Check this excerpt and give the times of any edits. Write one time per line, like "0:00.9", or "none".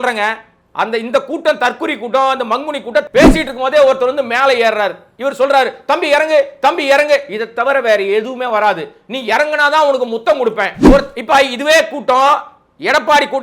0:03.1
0:10.8